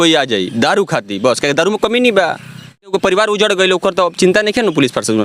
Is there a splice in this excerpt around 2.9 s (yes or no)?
yes